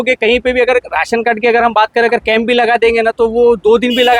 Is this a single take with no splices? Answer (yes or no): yes